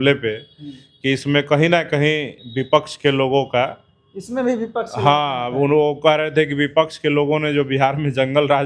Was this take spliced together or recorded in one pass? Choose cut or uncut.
uncut